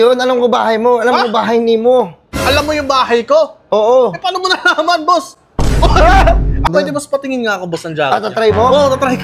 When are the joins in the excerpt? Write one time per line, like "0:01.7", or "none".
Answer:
0:06.7